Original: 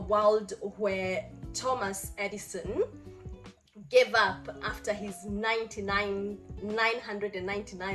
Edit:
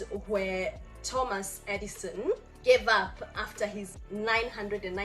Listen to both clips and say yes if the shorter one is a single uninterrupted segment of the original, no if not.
no